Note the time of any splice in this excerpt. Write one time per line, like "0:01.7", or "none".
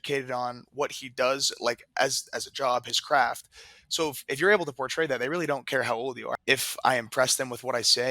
0:06.3